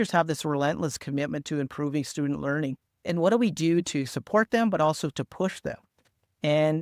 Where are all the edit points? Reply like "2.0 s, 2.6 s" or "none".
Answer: none